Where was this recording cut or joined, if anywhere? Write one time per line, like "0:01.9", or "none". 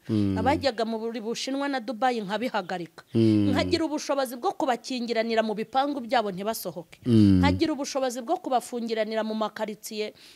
none